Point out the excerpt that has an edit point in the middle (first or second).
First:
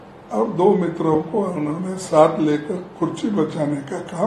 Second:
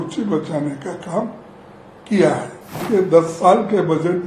second